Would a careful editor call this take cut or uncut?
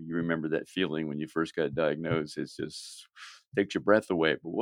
uncut